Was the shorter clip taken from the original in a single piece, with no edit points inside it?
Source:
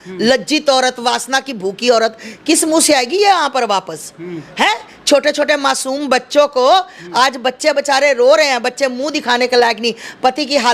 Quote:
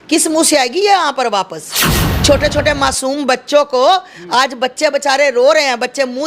no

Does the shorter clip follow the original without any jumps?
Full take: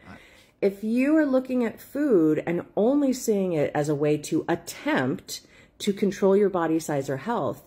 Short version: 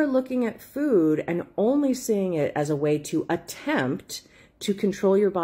yes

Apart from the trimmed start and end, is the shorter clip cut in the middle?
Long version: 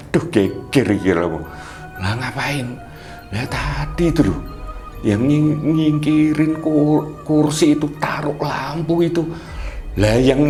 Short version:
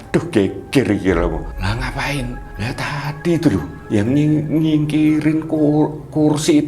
yes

